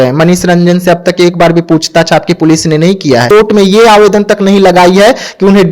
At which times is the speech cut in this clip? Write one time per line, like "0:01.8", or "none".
0:03.3